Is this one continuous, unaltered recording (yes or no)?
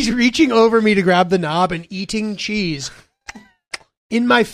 yes